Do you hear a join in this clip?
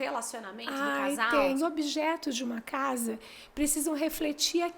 yes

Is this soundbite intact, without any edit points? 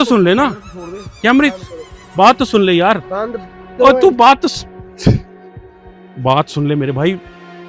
yes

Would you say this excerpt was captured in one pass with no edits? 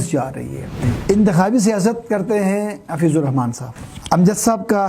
no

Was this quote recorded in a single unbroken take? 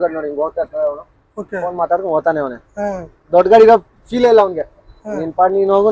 yes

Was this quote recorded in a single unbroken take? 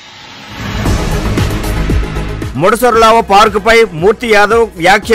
no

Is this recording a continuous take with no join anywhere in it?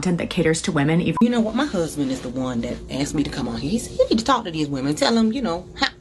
no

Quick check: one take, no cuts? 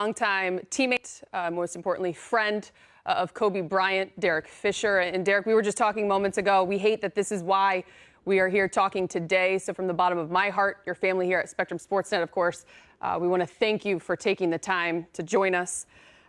no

